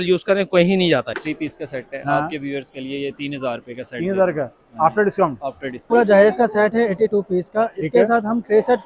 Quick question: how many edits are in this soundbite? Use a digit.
2